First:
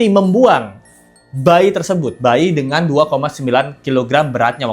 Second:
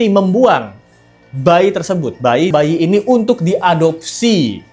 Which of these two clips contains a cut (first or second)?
second